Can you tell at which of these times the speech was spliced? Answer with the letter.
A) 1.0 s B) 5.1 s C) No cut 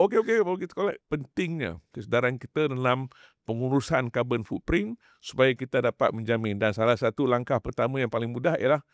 A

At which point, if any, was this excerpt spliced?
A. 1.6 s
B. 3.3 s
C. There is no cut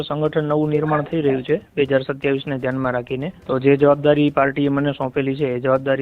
B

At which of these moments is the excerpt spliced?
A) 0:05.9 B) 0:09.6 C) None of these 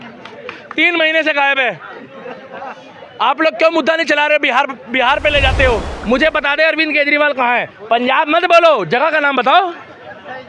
A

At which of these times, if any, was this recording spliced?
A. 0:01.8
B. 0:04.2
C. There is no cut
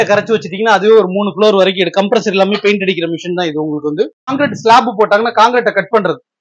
B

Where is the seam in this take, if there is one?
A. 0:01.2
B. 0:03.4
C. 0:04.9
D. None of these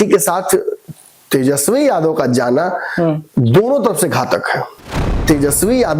C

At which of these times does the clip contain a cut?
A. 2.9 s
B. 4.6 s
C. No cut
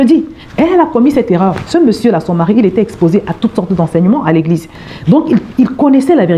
B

